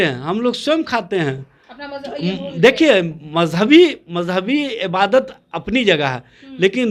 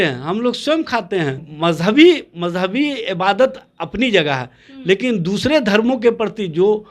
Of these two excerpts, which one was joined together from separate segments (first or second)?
second